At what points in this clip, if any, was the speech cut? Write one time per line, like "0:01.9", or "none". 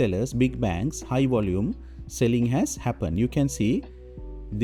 none